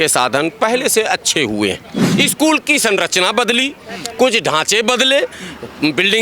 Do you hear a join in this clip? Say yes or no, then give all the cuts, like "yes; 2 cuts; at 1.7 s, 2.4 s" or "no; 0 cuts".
yes; 1 cut; at 2.0 s